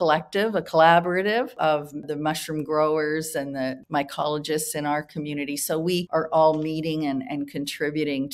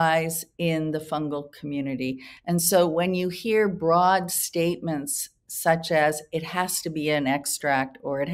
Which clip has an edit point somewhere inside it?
first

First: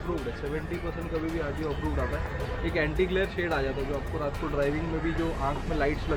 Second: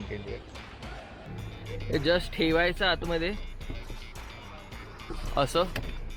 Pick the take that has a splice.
second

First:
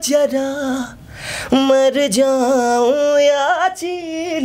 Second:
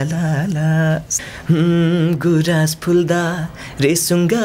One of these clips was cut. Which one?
second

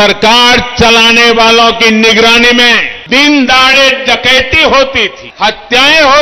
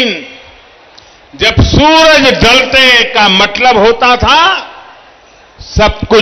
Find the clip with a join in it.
first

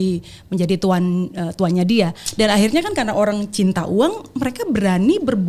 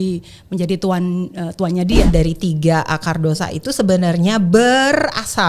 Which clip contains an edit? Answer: second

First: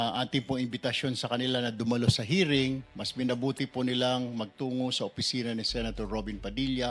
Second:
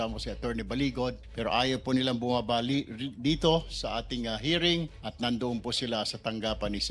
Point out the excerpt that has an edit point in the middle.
second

